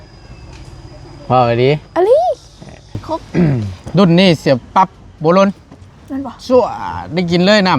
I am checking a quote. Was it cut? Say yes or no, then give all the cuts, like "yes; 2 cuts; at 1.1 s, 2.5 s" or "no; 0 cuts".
yes; 1 cut; at 3.7 s